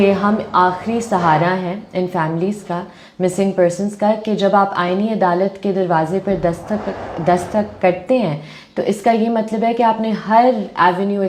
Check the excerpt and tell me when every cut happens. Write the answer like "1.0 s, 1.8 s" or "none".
none